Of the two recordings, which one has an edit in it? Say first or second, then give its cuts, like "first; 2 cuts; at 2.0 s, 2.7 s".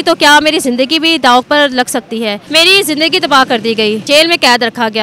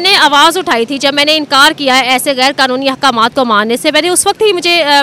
first; 2 cuts; at 2.4 s, 4.0 s